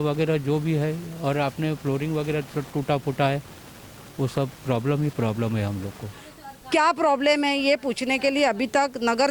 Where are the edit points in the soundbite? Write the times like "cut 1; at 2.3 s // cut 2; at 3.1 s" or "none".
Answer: cut 1; at 6.2 s